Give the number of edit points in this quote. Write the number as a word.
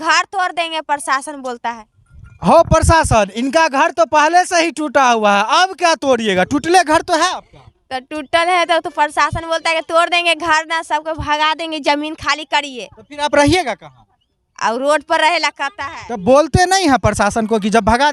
zero